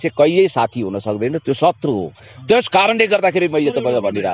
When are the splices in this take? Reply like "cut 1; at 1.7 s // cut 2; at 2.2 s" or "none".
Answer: none